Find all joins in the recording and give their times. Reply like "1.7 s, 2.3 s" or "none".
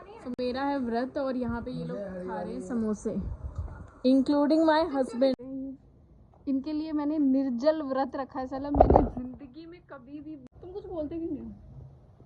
5.3 s, 10.5 s